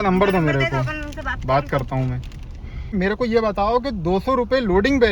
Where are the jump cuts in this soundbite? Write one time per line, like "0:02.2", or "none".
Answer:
0:02.9